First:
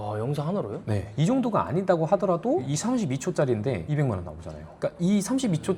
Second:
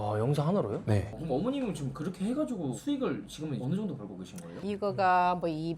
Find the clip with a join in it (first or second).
second